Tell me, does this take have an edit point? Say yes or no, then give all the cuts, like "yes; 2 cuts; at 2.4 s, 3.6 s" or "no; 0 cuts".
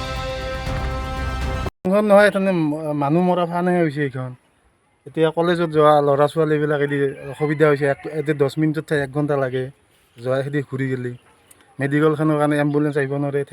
yes; 1 cut; at 1.6 s